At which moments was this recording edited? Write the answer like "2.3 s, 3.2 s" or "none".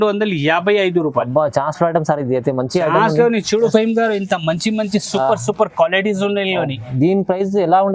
none